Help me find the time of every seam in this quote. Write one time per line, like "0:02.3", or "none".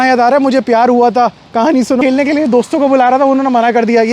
0:02.0